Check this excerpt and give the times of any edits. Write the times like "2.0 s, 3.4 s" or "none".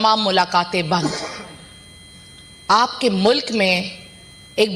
none